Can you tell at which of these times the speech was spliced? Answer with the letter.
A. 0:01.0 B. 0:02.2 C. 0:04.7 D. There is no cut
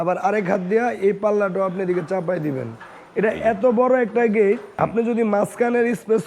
C